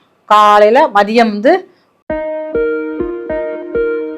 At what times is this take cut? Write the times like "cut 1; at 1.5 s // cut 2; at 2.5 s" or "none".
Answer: cut 1; at 1.8 s